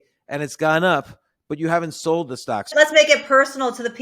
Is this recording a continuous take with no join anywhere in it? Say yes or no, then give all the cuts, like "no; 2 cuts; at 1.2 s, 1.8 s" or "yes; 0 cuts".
no; 1 cut; at 2.7 s